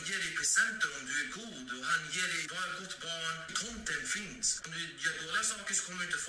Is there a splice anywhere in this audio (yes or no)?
yes